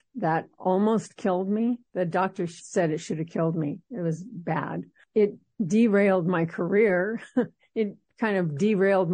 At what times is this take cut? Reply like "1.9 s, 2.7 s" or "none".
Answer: none